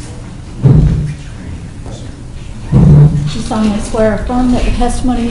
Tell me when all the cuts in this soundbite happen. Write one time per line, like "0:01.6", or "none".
none